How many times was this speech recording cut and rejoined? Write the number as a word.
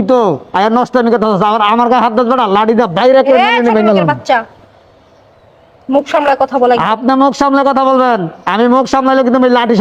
zero